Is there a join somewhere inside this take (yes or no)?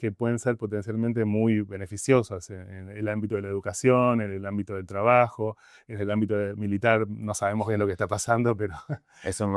no